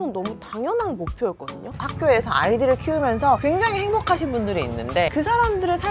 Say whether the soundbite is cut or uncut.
cut